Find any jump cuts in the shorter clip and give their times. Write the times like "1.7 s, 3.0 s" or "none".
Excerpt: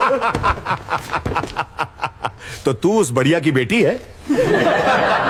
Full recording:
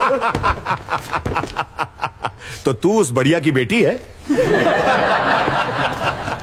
none